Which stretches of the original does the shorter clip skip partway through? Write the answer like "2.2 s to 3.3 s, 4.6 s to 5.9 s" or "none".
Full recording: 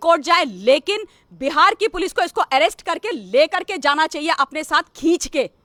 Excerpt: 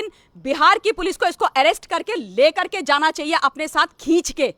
none